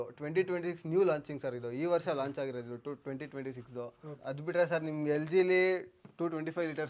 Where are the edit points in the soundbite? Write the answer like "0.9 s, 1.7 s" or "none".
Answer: none